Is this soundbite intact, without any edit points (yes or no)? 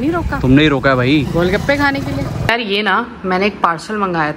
no